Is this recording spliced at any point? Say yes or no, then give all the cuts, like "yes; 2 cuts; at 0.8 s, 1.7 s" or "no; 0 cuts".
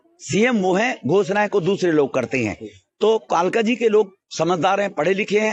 no; 0 cuts